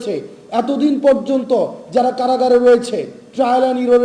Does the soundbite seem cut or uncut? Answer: uncut